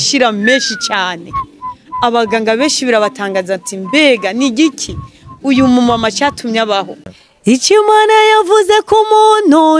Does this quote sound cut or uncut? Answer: cut